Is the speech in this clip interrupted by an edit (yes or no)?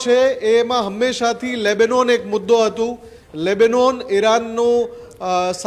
no